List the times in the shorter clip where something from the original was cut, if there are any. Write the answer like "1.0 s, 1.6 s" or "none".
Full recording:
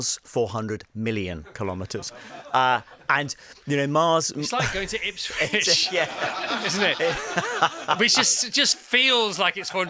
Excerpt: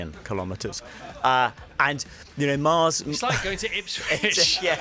none